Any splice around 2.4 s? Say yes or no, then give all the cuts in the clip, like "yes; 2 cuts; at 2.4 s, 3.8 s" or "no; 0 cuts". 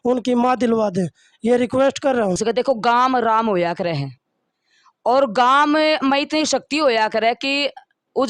yes; 1 cut; at 2.4 s